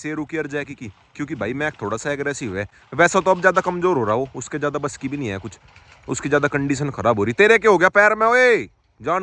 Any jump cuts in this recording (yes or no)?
no